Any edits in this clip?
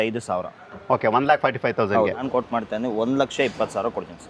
yes; 1 cut; at 2.2 s

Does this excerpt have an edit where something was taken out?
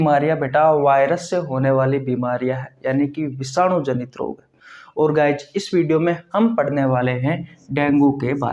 no; 0 cuts

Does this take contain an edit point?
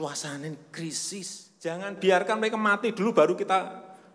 yes; 1 cut; at 1.8 s

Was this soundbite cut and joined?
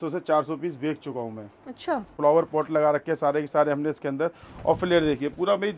yes; 1 cut; at 2.1 s

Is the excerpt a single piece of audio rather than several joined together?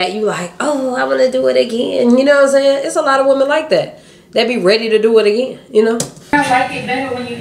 no; 1 cut; at 6.3 s

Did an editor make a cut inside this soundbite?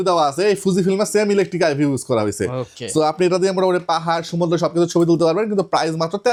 no; 0 cuts

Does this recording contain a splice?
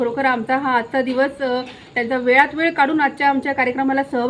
no; 0 cuts

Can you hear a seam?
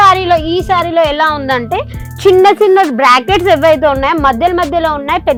no; 0 cuts

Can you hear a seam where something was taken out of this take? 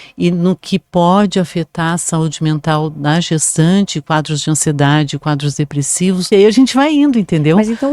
yes; 1 cut; at 6.3 s

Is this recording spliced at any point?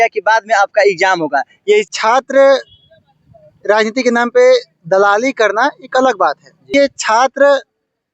yes; 2 cuts; at 1.9 s, 6.7 s

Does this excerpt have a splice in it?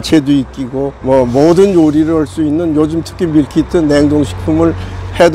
no; 0 cuts

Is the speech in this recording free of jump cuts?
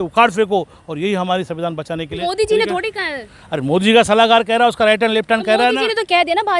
yes; 0 cuts

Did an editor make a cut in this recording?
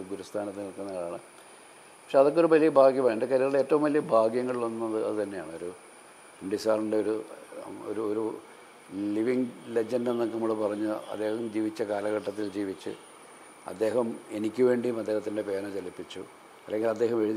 no; 0 cuts

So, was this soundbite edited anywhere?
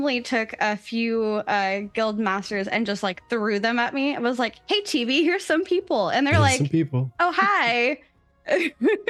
no; 0 cuts

